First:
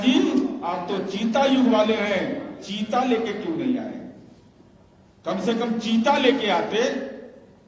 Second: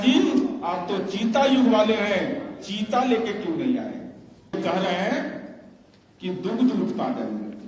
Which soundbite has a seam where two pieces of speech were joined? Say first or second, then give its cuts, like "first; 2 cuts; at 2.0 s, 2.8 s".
second; 1 cut; at 4.5 s